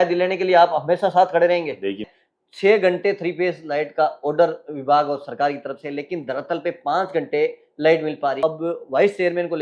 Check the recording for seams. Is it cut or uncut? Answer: cut